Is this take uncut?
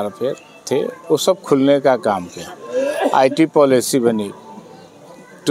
yes; 0 cuts

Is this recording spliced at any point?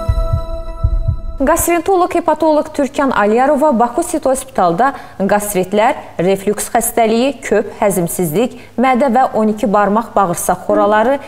yes; 1 cut; at 1.2 s

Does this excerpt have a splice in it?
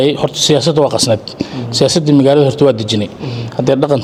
no; 0 cuts

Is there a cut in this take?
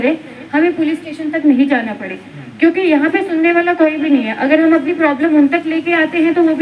no; 0 cuts

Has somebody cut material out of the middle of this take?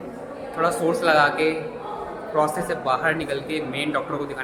no; 0 cuts

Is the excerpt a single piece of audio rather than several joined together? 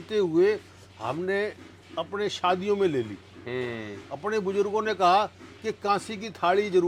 yes; 0 cuts

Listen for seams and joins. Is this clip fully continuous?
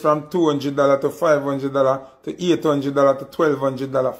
yes; 0 cuts

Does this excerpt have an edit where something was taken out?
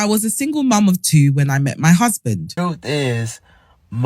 yes; 1 cut; at 2.5 s

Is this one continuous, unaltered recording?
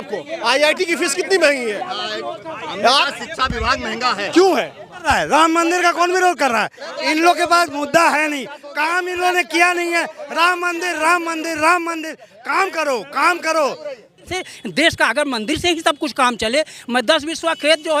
no; 2 cuts; at 5.0 s, 14.3 s

